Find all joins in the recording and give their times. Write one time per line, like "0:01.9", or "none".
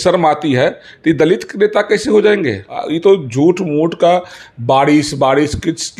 0:02.8